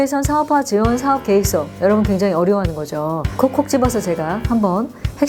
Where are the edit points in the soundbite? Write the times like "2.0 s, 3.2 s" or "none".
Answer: none